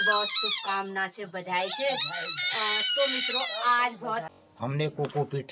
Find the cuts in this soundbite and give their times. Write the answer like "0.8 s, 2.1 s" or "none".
4.3 s

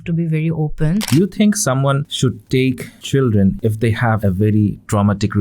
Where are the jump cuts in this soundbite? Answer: 1.1 s, 2.6 s, 3.9 s

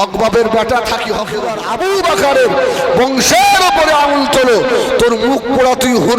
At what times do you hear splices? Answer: 1.6 s

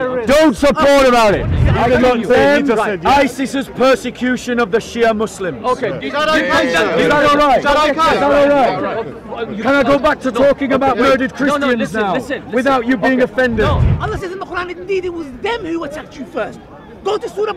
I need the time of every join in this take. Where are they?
1.6 s, 13.9 s

